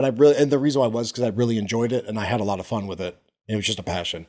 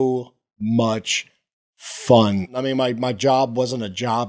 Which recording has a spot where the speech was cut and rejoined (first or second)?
second